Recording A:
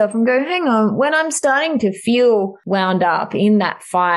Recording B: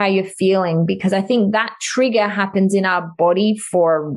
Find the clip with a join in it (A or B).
A